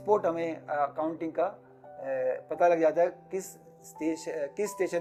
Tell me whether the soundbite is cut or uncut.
uncut